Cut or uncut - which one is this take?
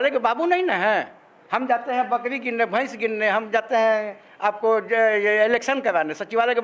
uncut